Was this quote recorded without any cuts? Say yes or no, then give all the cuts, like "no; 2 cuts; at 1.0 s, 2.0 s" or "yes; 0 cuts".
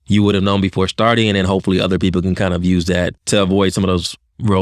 no; 1 cut; at 3.1 s